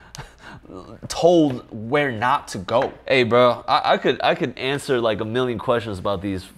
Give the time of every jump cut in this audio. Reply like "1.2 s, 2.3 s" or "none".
none